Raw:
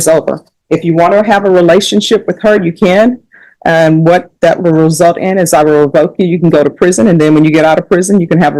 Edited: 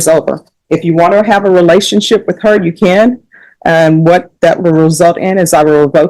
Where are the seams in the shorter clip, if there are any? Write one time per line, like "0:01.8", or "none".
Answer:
none